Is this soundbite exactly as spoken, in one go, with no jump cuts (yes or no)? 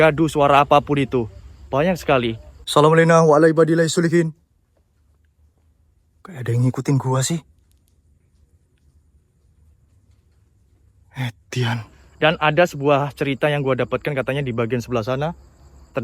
no